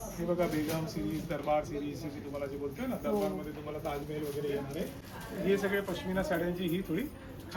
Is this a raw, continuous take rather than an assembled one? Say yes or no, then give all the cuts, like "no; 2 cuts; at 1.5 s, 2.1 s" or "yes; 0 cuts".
yes; 0 cuts